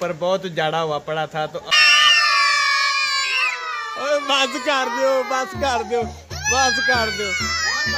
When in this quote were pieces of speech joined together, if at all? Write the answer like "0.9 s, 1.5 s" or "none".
1.7 s